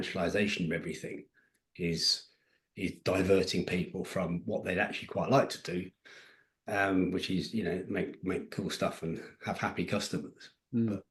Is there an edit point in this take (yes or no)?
no